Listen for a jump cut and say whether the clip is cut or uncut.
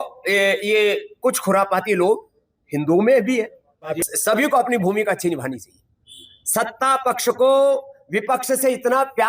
cut